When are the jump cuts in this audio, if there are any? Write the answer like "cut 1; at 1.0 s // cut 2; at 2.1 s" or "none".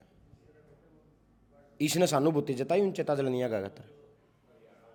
none